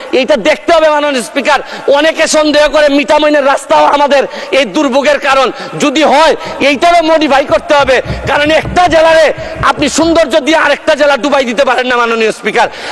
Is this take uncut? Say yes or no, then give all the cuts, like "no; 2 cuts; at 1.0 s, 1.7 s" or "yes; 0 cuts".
yes; 0 cuts